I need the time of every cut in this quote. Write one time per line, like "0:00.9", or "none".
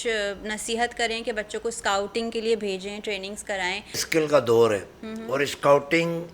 0:04.0